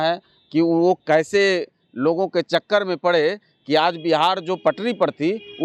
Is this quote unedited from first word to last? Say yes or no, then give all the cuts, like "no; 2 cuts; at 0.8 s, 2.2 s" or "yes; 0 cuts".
yes; 0 cuts